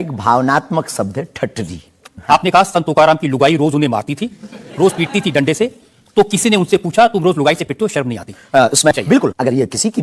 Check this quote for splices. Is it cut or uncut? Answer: cut